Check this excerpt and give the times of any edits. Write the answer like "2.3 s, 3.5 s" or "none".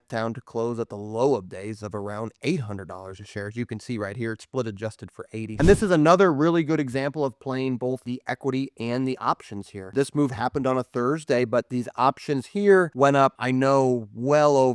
5.6 s, 8.0 s, 9.9 s, 13.3 s